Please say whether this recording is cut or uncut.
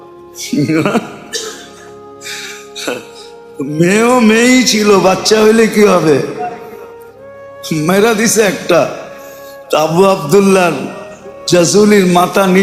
uncut